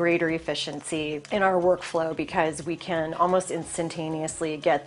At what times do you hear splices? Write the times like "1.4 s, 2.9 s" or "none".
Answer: 1.2 s